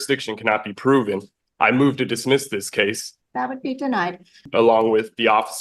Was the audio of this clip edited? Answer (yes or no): yes